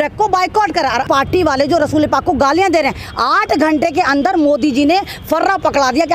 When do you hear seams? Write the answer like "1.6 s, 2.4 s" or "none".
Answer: 1.1 s